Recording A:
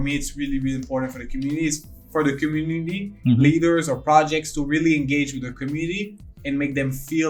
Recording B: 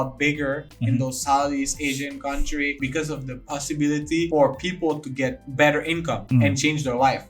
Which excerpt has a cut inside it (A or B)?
B